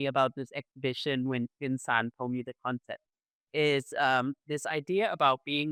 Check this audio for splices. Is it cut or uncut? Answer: uncut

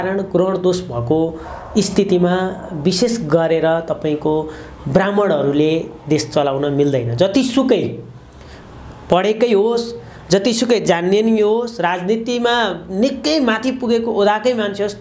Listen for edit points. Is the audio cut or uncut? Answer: uncut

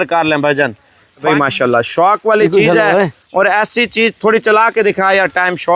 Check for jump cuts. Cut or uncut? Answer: cut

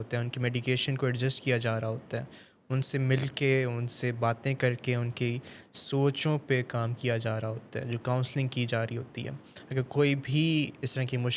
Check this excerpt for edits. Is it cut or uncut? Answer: uncut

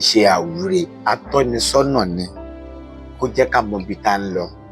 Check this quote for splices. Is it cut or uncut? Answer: cut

